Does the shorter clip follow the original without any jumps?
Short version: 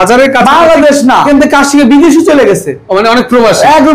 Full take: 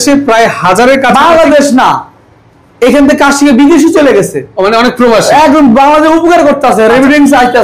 no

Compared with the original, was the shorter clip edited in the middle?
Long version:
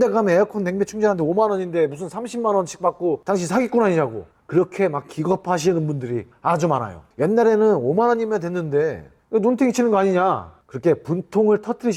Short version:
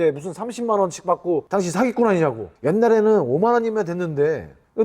yes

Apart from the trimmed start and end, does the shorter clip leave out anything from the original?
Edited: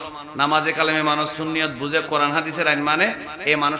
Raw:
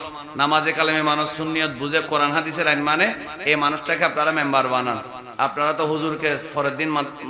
no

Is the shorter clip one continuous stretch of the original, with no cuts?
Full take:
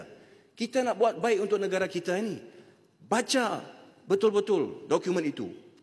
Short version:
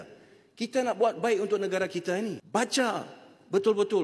no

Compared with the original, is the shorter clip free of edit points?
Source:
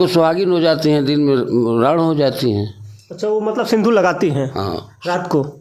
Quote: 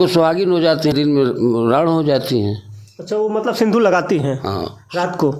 no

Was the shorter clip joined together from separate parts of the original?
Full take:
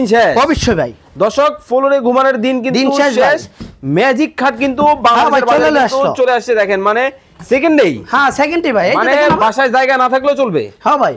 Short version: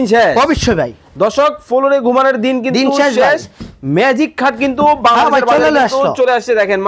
no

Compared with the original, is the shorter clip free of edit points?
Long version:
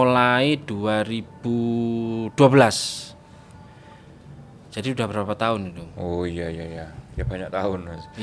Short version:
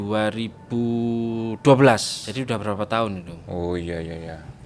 no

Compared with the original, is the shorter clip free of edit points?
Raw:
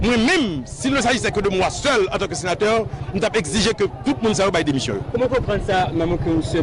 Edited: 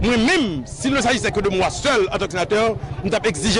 no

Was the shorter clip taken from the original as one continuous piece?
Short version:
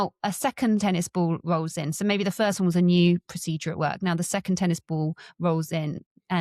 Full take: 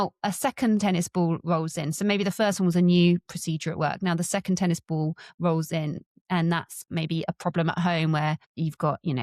yes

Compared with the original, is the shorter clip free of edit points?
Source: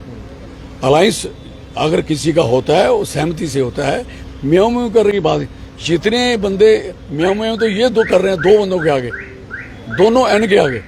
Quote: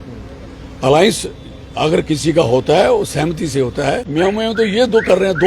no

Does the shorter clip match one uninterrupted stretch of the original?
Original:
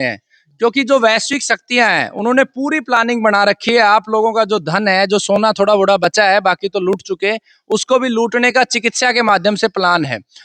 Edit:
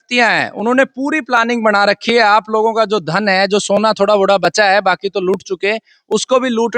yes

